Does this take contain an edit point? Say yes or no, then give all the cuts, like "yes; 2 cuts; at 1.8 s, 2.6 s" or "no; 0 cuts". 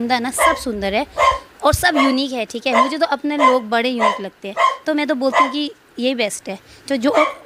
no; 0 cuts